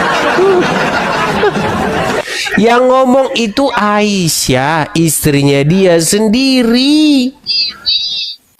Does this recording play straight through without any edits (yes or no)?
no